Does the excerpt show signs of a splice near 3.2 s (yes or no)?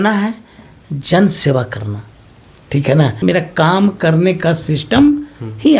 yes